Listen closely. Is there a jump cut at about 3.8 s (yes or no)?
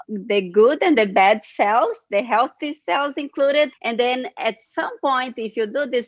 yes